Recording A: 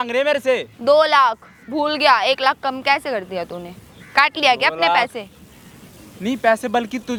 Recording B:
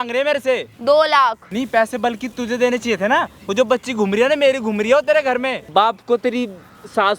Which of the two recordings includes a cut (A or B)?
B